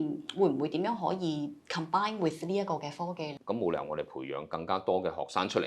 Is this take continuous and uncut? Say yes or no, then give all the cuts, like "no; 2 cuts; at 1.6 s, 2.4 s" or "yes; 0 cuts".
no; 1 cut; at 3.4 s